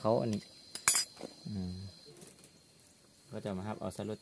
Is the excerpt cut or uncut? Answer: cut